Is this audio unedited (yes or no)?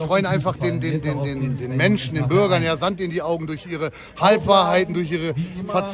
yes